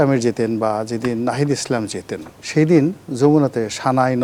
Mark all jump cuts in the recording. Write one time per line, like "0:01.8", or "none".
none

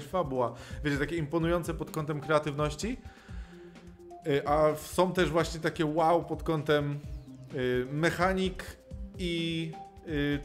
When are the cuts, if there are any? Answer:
none

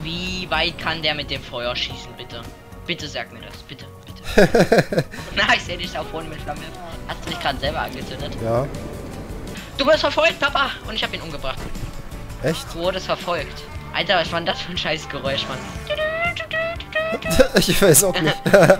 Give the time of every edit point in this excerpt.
0:05.2
0:09.5
0:13.7

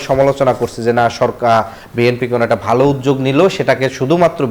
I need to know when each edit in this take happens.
none

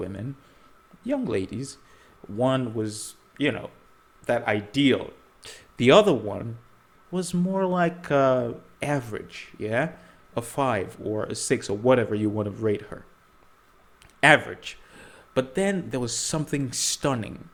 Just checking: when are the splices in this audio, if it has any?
none

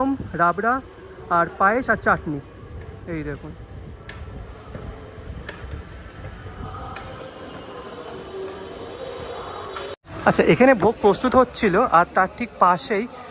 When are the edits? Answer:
none

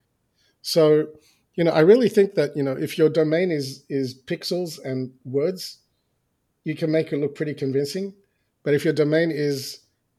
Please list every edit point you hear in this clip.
none

